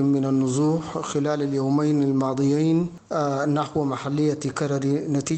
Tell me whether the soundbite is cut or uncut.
cut